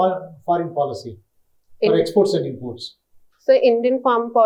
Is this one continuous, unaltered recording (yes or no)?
yes